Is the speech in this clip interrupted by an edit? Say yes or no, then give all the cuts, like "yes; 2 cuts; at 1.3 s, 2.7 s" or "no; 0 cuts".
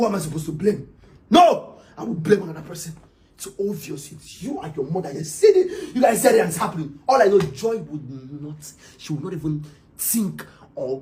no; 0 cuts